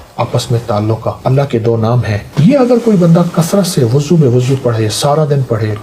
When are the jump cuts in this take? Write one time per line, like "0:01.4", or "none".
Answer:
0:01.2
0:02.3